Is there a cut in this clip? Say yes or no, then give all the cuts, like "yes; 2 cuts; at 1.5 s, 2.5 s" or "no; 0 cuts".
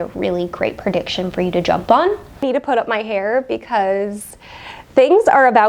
yes; 1 cut; at 2.4 s